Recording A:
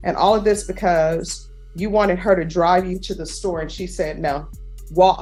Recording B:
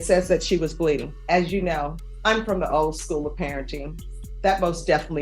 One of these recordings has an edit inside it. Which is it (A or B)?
B